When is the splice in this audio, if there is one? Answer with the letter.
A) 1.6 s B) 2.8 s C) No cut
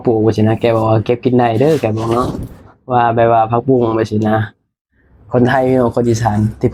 C